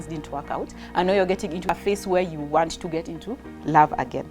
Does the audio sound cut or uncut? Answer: cut